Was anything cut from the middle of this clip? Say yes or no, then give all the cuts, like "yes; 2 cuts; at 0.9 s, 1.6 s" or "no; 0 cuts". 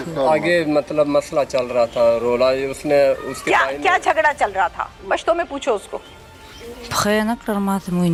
no; 0 cuts